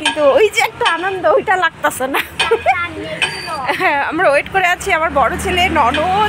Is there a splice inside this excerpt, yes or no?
no